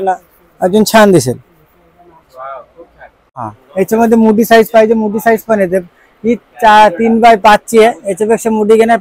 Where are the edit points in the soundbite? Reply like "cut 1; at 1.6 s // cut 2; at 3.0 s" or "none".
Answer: cut 1; at 3.2 s